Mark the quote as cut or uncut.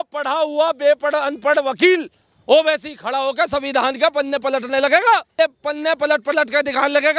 cut